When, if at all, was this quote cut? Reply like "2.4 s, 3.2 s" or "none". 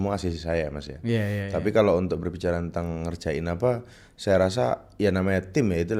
none